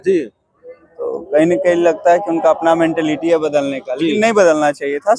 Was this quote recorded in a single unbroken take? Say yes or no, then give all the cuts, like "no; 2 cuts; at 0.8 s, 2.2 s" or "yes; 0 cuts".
yes; 0 cuts